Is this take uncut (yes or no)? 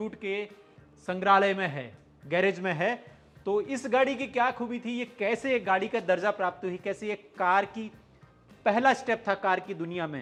yes